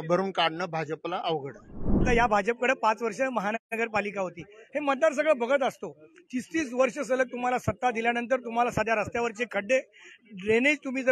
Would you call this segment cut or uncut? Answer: cut